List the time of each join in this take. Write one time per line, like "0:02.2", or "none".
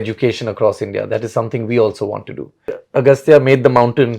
0:02.8

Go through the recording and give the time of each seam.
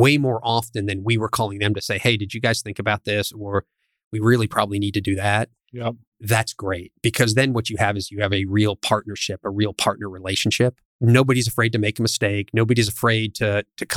0:10.9

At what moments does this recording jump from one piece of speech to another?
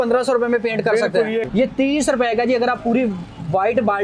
0:01.5

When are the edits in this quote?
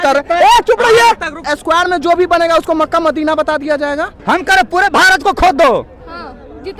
0:01.5
0:04.1

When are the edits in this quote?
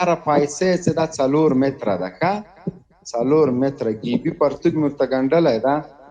none

